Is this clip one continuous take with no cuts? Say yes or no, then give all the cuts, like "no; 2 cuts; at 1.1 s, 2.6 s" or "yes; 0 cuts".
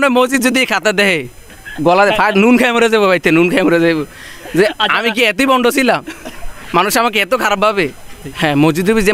no; 1 cut; at 8.2 s